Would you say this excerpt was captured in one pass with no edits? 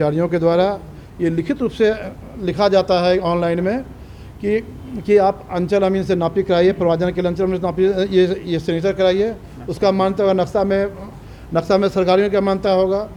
yes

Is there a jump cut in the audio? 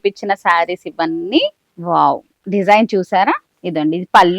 no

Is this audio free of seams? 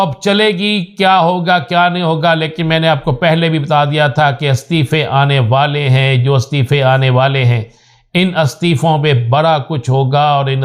yes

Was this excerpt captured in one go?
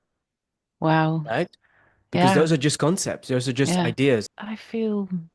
no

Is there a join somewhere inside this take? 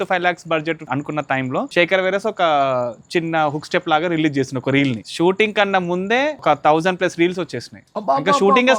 yes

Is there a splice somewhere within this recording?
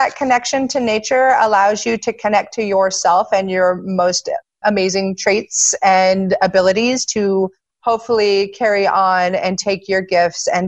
no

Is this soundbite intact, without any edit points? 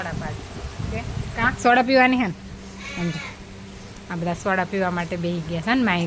yes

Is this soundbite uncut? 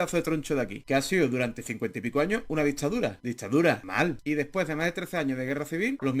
no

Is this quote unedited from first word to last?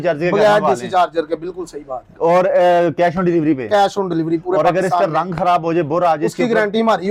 yes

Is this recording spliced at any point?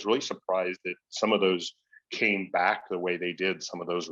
no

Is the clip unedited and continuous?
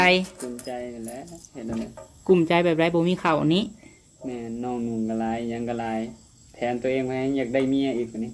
yes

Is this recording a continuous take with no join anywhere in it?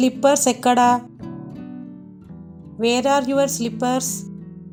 yes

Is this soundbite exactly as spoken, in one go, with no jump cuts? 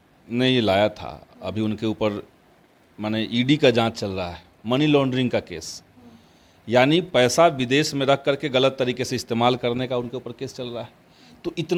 yes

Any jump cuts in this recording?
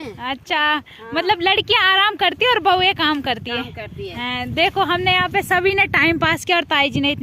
no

